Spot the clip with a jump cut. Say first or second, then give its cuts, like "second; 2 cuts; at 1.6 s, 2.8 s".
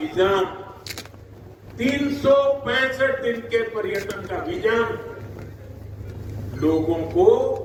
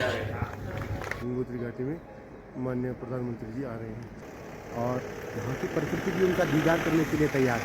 second; 2 cuts; at 1.2 s, 4.3 s